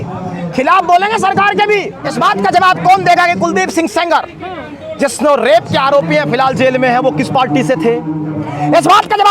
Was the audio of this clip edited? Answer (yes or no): yes